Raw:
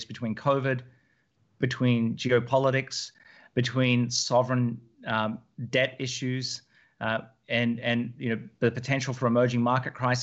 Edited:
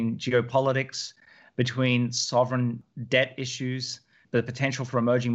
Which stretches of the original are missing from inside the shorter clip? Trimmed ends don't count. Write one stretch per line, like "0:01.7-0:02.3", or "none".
0:04.9-0:05.5
0:06.8-0:08.5